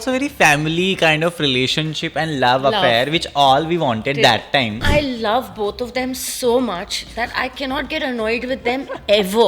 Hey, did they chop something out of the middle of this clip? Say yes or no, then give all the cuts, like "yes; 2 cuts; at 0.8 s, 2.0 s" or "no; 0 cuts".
yes; 1 cut; at 4.8 s